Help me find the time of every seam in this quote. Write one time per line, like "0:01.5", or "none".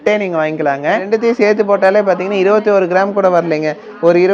0:01.0